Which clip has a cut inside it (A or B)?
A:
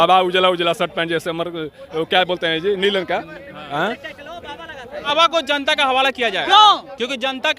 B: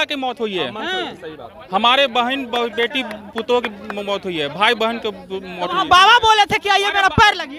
A